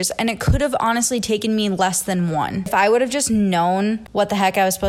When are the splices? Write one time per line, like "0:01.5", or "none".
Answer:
0:02.7
0:04.0